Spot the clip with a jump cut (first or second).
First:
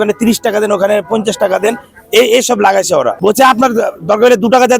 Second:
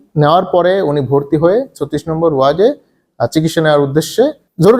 first